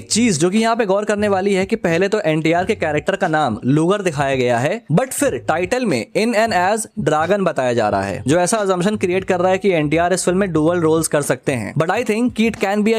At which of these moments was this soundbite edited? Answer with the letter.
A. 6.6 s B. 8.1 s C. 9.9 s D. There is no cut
D